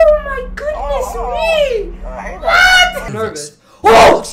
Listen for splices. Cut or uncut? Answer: cut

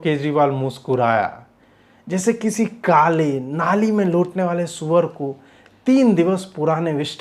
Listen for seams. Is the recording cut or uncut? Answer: uncut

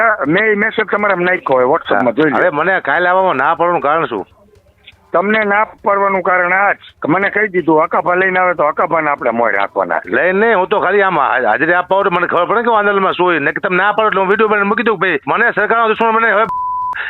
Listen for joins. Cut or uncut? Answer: cut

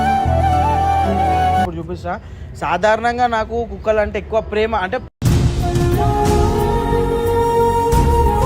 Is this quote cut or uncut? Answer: cut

